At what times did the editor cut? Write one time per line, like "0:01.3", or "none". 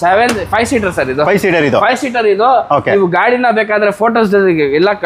none